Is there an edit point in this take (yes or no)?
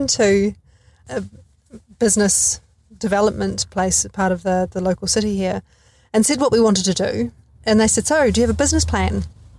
yes